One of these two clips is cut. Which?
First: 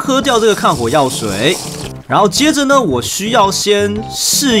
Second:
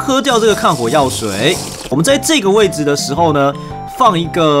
second; 1 cut; at 1.9 s

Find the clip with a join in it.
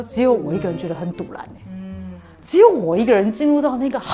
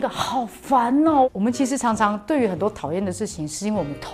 second; 1 cut; at 1.3 s

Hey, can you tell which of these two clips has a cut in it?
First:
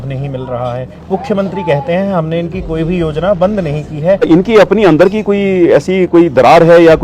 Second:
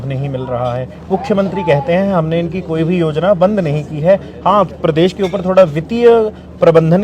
first; 1 cut; at 4.3 s

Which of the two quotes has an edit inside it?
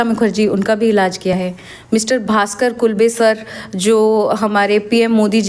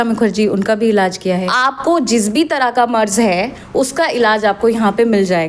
second; 1 cut; at 1.4 s

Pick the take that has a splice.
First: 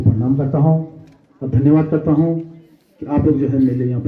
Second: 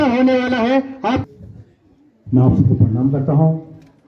second; 1 cut; at 1.3 s

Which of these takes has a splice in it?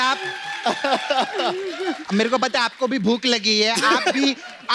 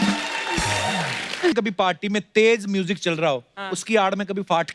second; 1 cut; at 1.5 s

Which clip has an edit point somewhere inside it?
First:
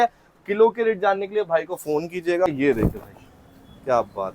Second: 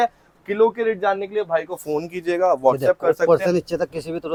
first; 1 cut; at 2.5 s

